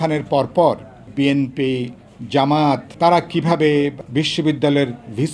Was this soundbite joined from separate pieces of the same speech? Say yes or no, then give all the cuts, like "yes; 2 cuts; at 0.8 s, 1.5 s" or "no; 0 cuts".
yes; 3 cuts; at 1.0 s, 2.9 s, 4.0 s